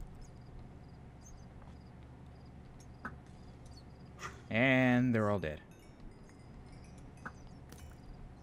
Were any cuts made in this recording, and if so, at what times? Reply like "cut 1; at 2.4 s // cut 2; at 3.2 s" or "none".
none